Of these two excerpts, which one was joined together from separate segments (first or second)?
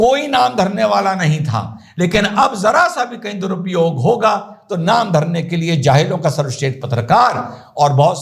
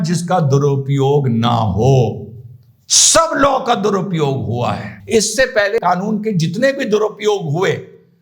second